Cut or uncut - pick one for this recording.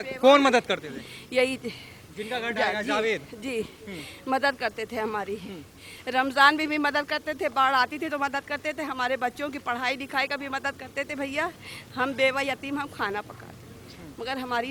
uncut